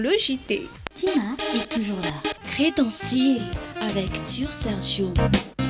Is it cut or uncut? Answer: cut